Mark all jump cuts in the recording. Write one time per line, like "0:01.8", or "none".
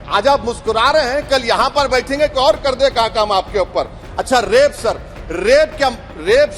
none